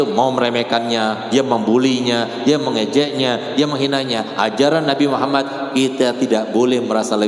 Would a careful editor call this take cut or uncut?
uncut